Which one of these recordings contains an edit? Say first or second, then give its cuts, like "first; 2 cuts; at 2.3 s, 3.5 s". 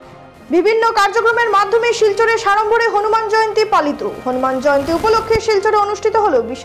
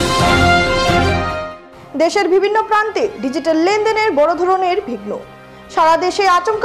second; 1 cut; at 1.5 s